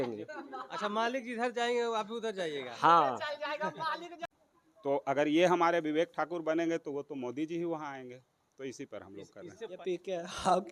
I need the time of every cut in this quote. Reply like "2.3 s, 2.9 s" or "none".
4.1 s